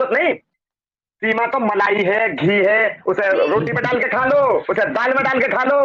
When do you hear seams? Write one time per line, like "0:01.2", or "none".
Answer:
none